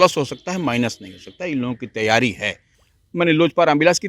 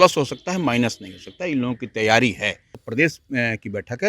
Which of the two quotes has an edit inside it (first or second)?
second